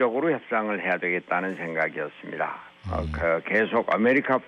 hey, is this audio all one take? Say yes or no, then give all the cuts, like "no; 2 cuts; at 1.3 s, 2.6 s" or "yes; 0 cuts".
no; 1 cut; at 3.1 s